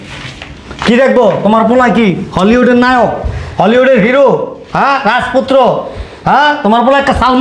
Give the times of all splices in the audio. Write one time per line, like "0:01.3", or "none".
none